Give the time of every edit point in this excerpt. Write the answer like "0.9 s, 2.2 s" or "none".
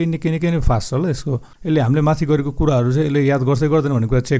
1.5 s